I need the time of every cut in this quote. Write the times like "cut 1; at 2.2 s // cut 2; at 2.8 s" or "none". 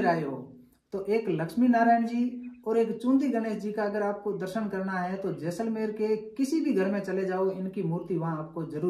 none